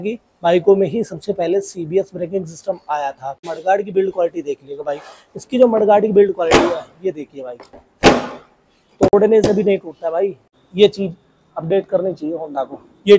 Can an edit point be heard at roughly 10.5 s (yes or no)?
yes